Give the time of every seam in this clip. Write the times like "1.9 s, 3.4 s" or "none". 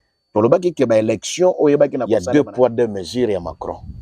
2.0 s